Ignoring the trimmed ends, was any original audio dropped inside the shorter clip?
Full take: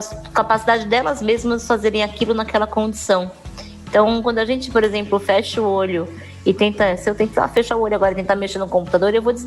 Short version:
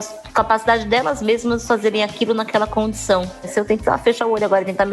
yes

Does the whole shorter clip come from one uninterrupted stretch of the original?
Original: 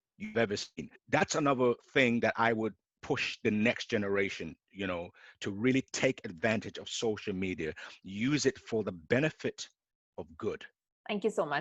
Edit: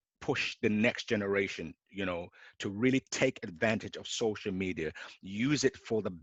yes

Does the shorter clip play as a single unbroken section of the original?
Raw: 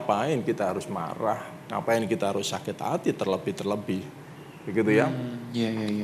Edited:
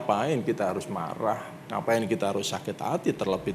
yes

